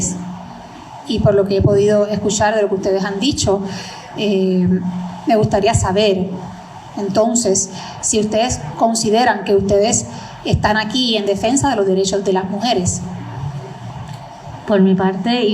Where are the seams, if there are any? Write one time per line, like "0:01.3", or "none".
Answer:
0:13.9